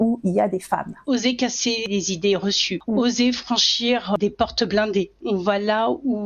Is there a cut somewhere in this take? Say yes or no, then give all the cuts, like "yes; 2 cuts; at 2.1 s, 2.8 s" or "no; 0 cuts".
yes; 5 cuts; at 0.9 s, 1.9 s, 2.7 s, 4.2 s, 5.2 s